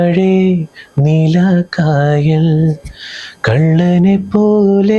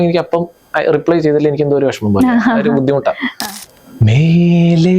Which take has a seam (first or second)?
second